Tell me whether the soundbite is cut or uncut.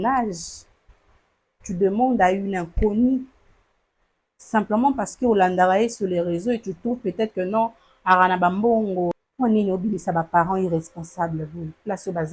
cut